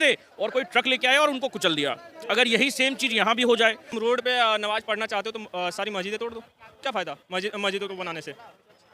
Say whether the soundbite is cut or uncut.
cut